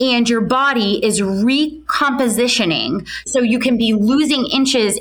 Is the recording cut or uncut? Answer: cut